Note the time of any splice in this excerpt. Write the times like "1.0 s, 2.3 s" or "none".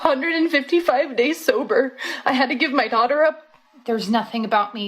3.6 s